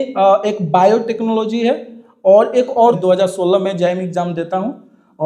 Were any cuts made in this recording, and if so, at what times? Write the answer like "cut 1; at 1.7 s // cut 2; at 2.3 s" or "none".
cut 1; at 3.0 s